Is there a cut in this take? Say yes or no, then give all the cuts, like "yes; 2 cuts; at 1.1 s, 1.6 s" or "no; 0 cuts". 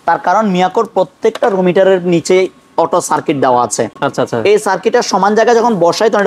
no; 0 cuts